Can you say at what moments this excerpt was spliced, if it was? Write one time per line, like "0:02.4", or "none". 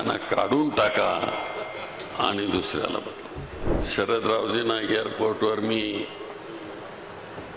0:03.6